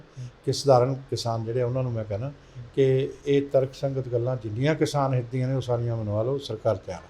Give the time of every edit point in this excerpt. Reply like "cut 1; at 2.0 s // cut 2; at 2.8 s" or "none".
none